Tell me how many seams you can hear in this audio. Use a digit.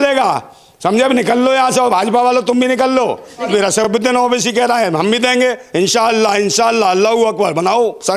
1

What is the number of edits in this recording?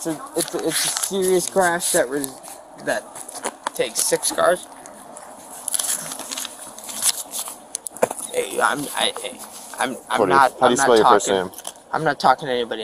0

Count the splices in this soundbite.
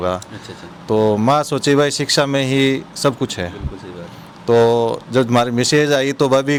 0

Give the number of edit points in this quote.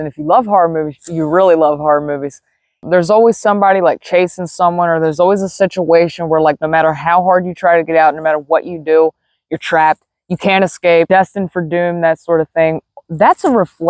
2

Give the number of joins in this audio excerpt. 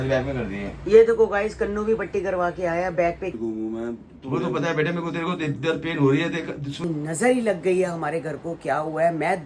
2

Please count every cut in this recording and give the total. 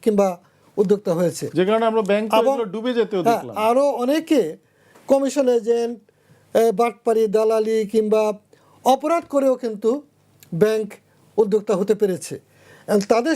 0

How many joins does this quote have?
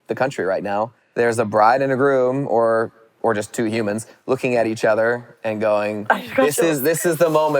1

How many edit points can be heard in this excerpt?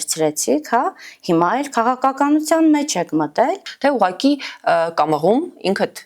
1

